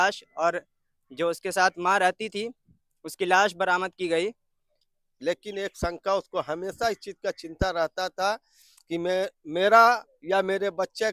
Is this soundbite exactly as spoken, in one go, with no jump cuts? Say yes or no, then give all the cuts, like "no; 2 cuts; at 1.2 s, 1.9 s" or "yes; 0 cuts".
no; 1 cut; at 5.1 s